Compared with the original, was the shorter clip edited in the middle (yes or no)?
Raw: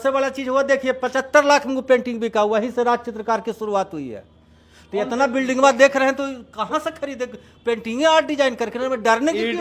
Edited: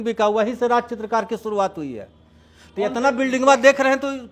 no